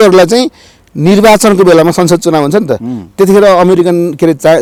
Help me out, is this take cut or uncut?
uncut